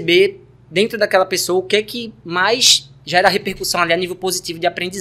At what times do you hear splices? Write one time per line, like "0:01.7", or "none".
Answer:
none